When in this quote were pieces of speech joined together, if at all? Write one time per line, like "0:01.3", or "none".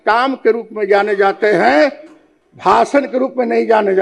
none